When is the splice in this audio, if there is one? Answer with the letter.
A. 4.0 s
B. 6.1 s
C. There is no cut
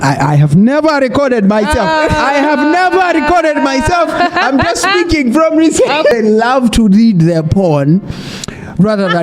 B